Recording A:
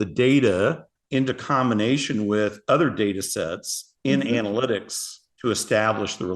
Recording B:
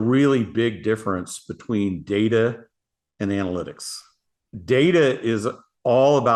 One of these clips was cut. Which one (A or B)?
A